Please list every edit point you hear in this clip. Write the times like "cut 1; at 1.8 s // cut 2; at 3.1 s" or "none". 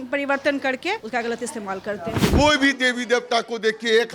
cut 1; at 1.0 s // cut 2; at 2.2 s